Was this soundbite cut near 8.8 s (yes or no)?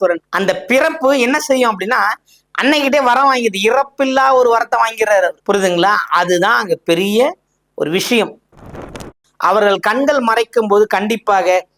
yes